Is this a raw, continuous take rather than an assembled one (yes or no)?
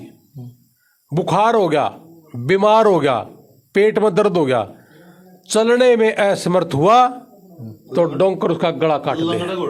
yes